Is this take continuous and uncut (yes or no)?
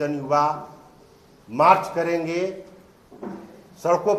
yes